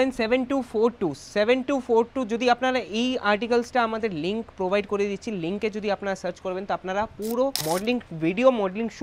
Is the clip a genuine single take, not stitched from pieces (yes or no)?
yes